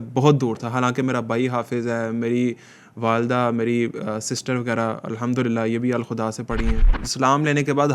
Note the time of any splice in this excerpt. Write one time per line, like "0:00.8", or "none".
0:06.9